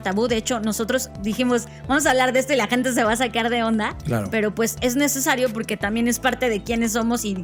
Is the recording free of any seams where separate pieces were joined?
yes; 0 cuts

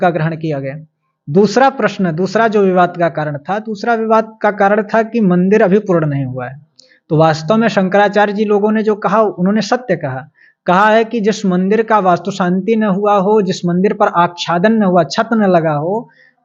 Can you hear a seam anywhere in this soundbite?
no; 0 cuts

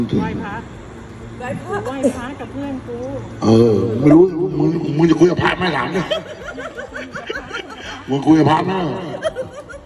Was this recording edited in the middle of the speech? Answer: no; 0 cuts

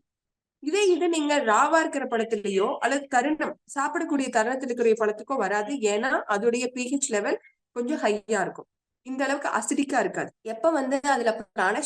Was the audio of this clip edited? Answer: no; 0 cuts

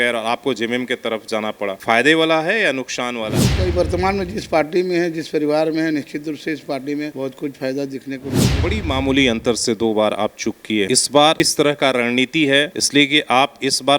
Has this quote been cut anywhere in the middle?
yes; 4 cuts; at 3.4 s, 8.5 s, 11.2 s, 12.8 s

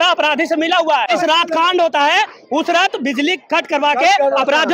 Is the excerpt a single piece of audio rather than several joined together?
no; 1 cut; at 1.1 s

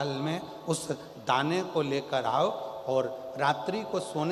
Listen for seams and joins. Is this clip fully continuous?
yes; 0 cuts

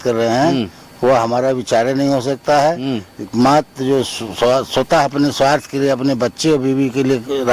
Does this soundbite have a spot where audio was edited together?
no; 0 cuts

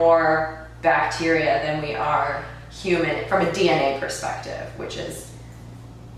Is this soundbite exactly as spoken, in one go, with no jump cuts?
yes; 0 cuts

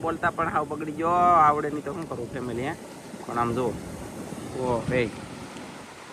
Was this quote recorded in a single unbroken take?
yes; 0 cuts

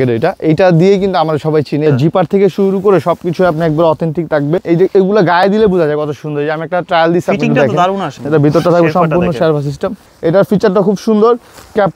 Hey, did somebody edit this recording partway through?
yes; 4 cuts; at 1.8 s, 4.6 s, 8.1 s, 10.1 s

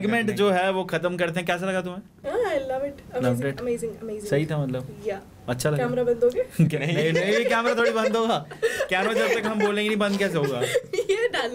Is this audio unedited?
yes; 0 cuts

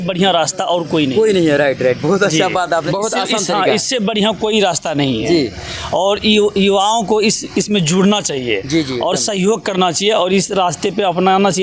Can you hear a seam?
no; 0 cuts

